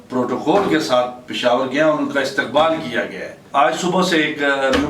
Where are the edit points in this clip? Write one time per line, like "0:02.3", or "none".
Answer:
0:03.4